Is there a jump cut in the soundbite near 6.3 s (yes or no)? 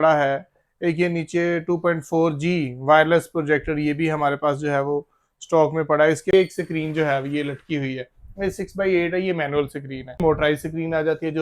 yes